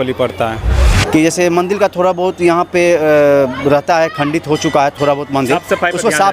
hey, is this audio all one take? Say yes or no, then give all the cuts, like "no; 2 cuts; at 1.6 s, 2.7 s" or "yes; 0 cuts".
no; 1 cut; at 0.9 s